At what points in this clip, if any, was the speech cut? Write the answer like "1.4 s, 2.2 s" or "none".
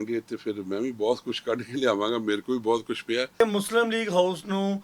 3.4 s